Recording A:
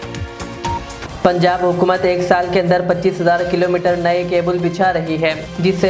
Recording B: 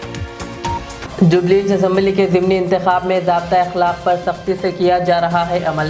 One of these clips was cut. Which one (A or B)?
A